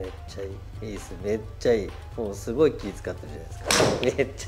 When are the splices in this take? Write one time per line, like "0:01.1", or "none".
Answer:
none